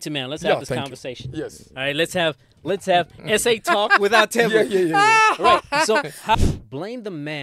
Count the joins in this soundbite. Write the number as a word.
one